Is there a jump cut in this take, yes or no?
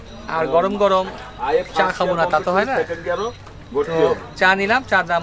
no